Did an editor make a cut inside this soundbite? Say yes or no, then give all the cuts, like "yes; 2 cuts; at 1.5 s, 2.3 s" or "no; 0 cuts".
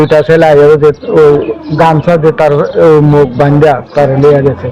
no; 0 cuts